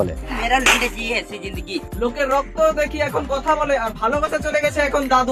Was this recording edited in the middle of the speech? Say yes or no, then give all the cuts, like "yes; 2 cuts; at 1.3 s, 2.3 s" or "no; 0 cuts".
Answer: no; 0 cuts